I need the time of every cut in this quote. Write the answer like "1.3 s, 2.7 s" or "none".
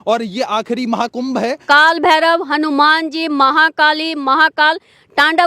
1.6 s